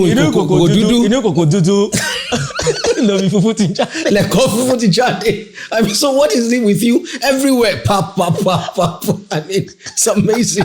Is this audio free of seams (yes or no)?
yes